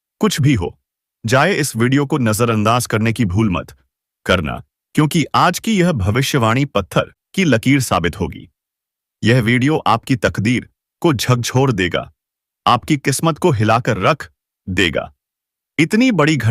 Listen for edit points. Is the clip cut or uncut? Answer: cut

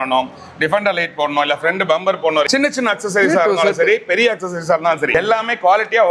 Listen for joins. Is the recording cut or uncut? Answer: cut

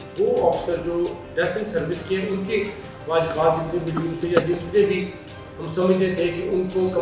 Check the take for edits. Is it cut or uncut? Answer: uncut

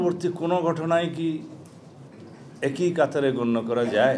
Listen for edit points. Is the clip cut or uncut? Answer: uncut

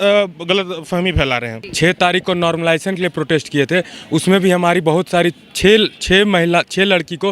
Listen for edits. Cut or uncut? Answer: cut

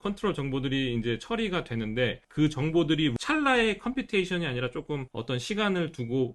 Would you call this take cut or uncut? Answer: cut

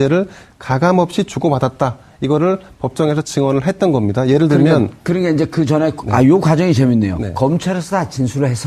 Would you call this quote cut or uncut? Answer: cut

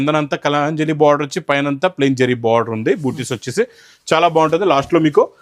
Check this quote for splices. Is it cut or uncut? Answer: uncut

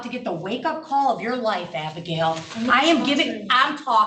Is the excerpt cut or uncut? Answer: uncut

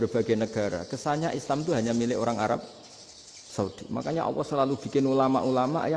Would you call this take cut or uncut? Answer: uncut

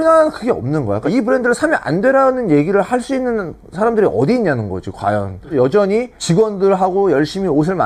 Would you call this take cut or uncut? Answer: uncut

